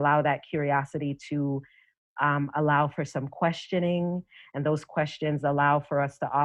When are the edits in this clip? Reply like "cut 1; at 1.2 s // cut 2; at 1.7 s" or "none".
none